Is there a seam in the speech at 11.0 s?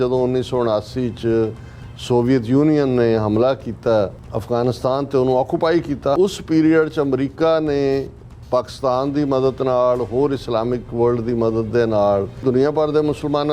no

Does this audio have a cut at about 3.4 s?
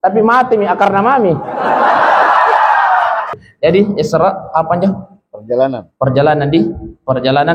yes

